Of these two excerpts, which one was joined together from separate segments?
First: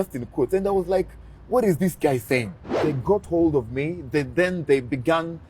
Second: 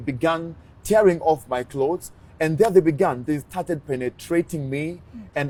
first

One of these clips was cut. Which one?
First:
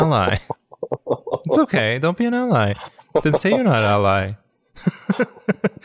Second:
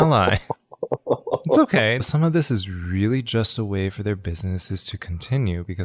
second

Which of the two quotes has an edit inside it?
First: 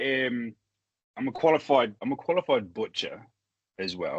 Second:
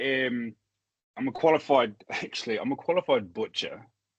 first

